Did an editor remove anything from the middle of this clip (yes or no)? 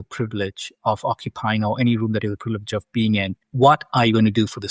yes